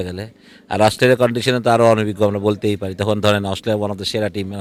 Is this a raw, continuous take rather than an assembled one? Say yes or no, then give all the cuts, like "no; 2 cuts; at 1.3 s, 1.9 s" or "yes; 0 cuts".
yes; 0 cuts